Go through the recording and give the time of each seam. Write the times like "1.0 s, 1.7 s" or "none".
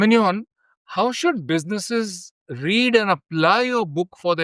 none